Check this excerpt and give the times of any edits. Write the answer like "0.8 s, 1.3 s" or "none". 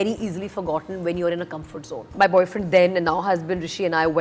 2.1 s